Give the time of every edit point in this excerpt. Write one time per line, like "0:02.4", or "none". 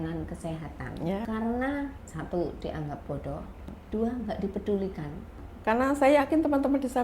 0:01.3
0:02.1
0:03.7
0:05.4